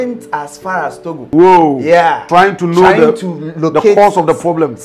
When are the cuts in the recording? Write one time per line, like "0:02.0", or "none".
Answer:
0:01.2
0:02.2